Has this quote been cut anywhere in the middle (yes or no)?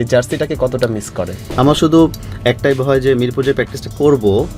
yes